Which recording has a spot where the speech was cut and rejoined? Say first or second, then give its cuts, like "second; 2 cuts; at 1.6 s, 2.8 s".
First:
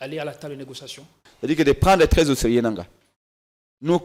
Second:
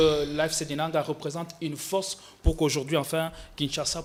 first; 1 cut; at 1.2 s